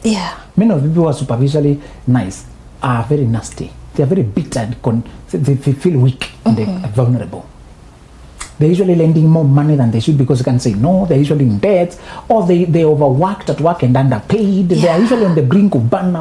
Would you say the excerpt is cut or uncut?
uncut